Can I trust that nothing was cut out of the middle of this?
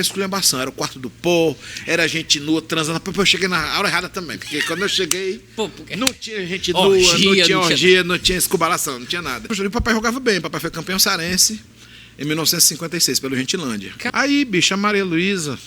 no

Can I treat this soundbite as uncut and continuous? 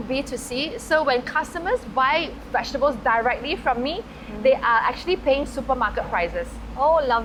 yes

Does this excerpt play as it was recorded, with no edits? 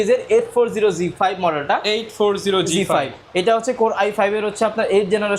yes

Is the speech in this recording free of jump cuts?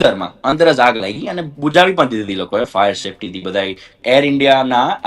no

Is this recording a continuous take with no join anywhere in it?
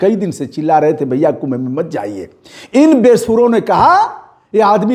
yes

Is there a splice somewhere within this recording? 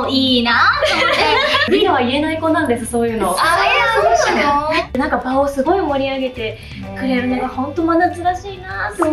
yes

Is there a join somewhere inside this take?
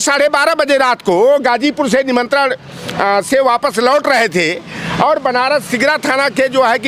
no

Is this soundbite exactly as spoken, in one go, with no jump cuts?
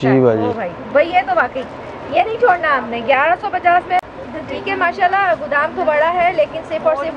no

